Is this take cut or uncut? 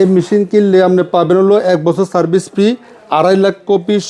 uncut